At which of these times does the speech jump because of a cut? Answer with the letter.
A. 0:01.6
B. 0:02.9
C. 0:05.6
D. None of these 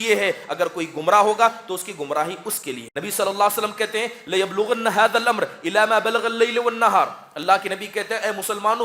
B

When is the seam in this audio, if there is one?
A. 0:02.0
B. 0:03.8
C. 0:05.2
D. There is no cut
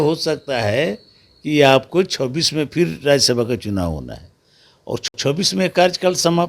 C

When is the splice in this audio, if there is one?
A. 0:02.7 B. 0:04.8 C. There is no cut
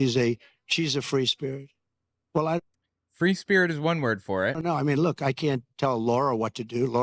C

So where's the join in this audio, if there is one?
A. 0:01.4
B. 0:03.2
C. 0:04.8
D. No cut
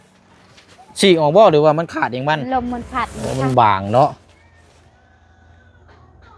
B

